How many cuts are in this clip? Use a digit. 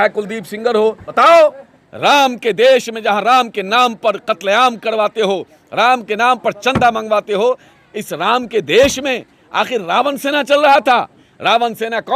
2